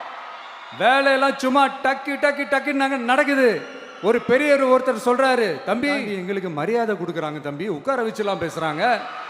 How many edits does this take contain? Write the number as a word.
one